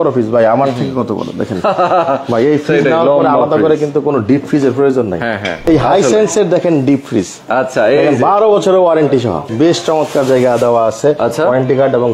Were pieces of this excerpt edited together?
yes; 2 cuts; at 5.6 s, 9.5 s

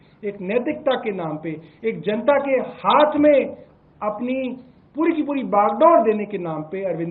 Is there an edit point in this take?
no; 0 cuts

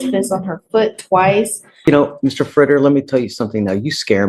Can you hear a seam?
yes; 1 cut; at 1.8 s

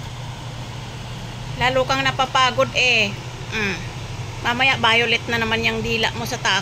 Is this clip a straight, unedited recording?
yes; 0 cuts

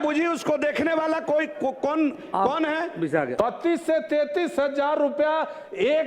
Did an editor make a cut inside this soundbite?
yes; 1 cut; at 3.3 s

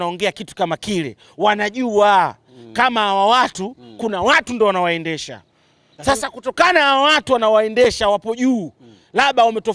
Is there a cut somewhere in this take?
no; 0 cuts

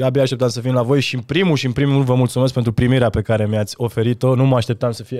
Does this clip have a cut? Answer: no; 0 cuts

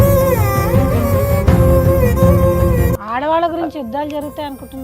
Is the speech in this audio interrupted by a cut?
yes; 1 cut; at 2.9 s

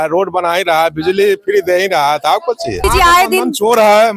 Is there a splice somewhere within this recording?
yes; 1 cut; at 2.8 s

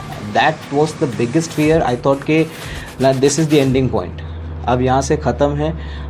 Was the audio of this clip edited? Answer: no; 0 cuts

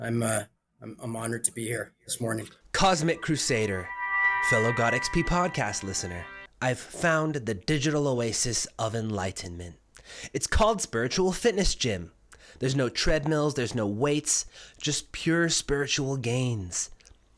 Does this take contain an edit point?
yes; 1 cut; at 2.6 s

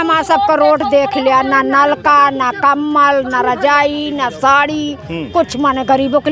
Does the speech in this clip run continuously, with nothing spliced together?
yes; 0 cuts

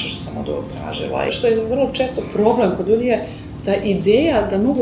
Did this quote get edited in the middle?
yes; 1 cut; at 1.3 s

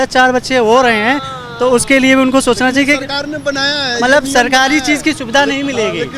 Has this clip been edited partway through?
no; 0 cuts

